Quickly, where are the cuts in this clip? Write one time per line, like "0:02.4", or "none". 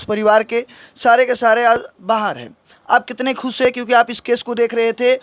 none